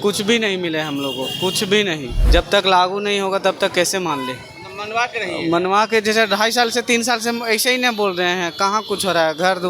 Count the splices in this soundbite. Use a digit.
1